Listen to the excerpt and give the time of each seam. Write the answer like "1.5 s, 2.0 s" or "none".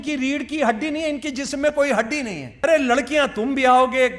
2.6 s